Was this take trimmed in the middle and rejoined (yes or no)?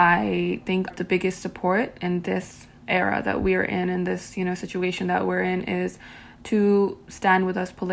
yes